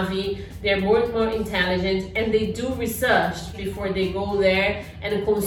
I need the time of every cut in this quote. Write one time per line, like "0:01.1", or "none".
0:03.6

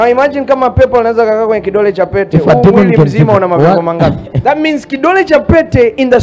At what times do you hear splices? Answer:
0:04.3

